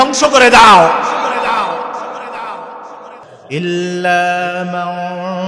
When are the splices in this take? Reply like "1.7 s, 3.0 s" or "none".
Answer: none